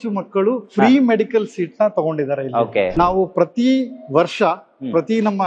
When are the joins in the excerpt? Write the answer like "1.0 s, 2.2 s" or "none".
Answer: 2.9 s